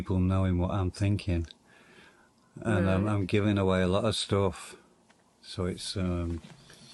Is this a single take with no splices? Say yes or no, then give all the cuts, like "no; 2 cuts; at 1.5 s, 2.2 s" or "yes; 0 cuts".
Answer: yes; 0 cuts